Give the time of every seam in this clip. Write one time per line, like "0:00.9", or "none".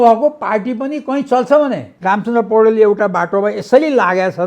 0:01.9